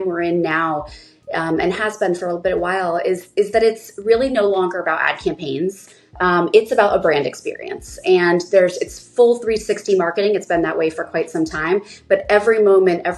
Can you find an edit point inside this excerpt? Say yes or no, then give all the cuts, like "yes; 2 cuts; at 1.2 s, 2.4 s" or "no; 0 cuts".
no; 0 cuts